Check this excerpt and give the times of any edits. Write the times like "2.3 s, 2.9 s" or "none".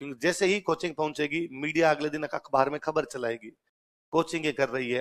none